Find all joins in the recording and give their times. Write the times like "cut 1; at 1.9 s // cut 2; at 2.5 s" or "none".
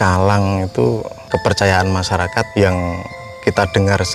cut 1; at 1.1 s // cut 2; at 2.5 s